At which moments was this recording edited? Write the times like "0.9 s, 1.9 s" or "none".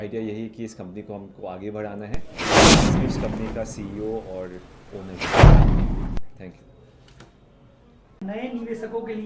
2.3 s, 3.3 s, 5.2 s, 6.2 s, 8.2 s